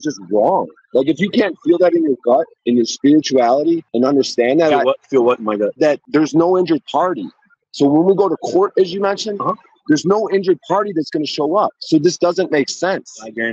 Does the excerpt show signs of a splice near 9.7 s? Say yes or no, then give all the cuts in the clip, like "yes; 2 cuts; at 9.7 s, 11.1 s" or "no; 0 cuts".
no; 3 cuts; at 2.5 s, 3.9 s, 5.9 s